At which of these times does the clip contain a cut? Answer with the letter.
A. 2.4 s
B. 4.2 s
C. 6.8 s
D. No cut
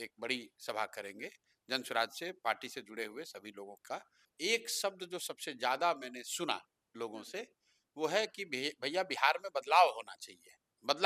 B